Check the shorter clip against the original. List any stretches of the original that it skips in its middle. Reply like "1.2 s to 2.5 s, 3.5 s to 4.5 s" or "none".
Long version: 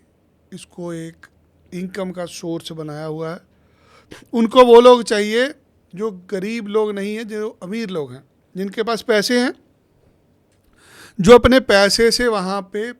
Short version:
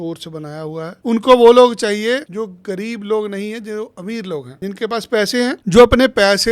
3.4 s to 4.2 s, 5.6 s to 5.9 s, 8.2 s to 8.5 s, 9.6 s to 11.1 s